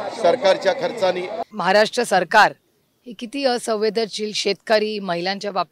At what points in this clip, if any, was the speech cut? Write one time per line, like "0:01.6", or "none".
0:01.4